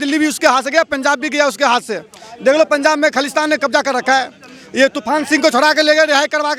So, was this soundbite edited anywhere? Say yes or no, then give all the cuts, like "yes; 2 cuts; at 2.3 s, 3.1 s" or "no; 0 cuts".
no; 0 cuts